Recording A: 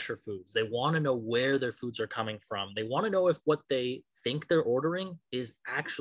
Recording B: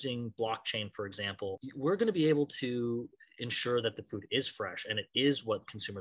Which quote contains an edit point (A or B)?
B